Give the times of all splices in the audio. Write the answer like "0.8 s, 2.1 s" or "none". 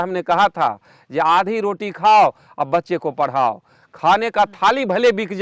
none

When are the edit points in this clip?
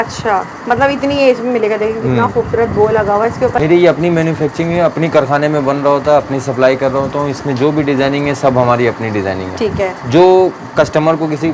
3.6 s

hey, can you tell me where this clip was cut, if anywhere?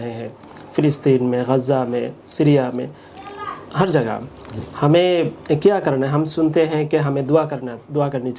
none

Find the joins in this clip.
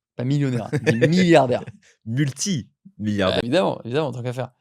3.4 s

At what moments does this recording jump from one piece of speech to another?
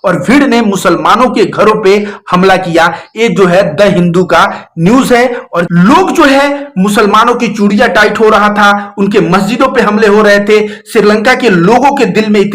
5.7 s

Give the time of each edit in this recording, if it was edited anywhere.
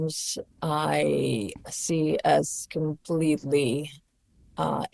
none

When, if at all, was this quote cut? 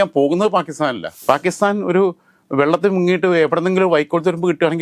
1.1 s

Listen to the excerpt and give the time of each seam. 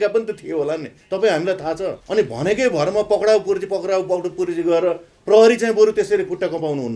2.0 s

